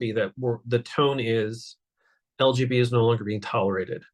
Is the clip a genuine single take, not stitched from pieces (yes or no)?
yes